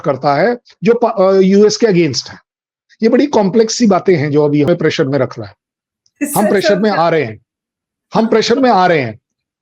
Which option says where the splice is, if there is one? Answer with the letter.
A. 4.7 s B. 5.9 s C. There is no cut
A